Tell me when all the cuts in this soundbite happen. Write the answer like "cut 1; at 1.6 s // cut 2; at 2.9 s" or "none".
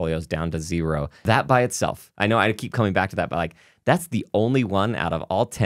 cut 1; at 1.1 s

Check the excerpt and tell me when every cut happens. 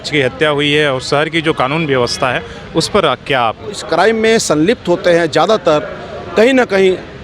cut 1; at 3.8 s

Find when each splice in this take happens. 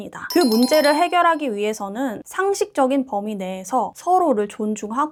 none

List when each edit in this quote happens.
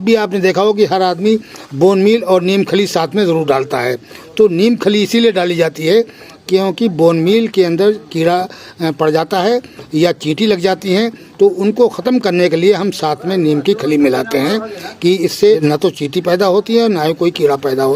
none

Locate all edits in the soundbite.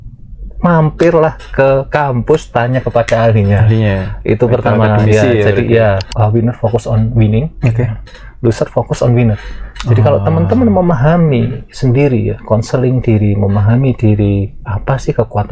cut 1; at 6.1 s

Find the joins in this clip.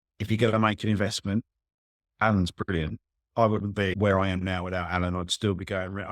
cut 1; at 3.9 s

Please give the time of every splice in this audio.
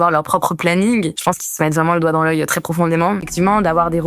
cut 1; at 1.1 s // cut 2; at 3.3 s

